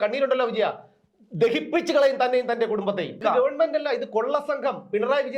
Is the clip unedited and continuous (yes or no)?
no